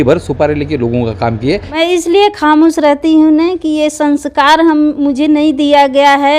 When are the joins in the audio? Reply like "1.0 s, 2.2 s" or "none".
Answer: 1.7 s